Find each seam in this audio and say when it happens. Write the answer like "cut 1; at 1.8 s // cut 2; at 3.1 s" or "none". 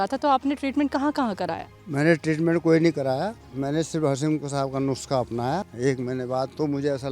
cut 1; at 5.7 s